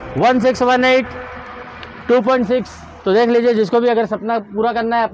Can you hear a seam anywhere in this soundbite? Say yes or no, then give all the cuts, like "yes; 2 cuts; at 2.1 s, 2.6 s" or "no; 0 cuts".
no; 0 cuts